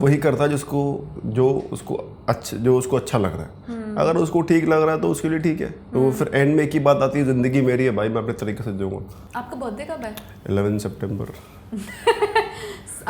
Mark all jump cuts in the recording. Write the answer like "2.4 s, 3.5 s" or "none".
9.2 s

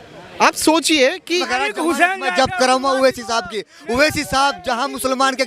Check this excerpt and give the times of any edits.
1.5 s

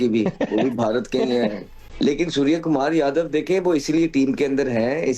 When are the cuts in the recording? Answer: 1.9 s

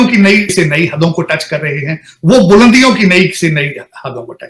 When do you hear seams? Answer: none

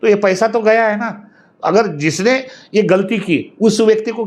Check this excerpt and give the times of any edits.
none

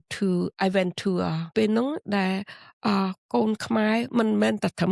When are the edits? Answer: 1.5 s

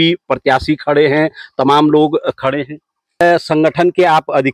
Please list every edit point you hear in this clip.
3.2 s

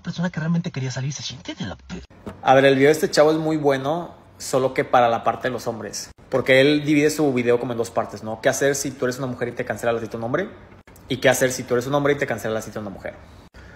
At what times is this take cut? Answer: 1.9 s

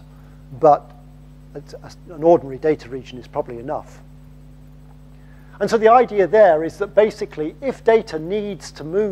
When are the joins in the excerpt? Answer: 5.3 s

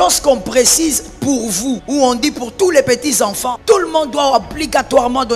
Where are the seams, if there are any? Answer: 1.8 s, 3.5 s

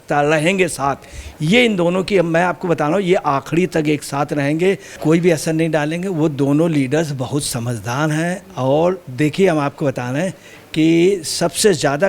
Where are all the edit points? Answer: 5.0 s

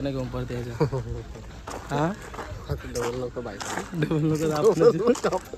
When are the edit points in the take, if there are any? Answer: none

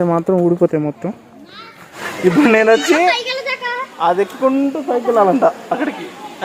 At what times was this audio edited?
2.0 s

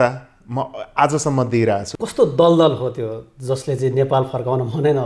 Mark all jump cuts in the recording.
1.9 s

